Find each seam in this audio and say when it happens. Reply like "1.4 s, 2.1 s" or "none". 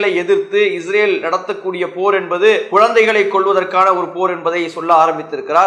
2.6 s